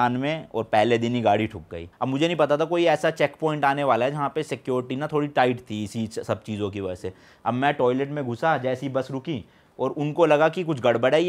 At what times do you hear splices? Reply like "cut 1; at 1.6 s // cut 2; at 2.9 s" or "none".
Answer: cut 1; at 1.9 s